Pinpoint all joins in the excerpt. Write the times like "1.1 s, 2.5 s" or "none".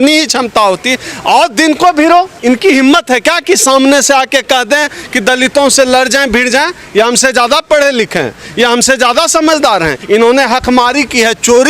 2.3 s, 10.0 s